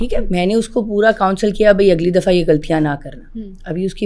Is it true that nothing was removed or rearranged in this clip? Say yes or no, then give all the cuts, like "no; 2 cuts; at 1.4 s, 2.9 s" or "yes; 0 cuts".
yes; 0 cuts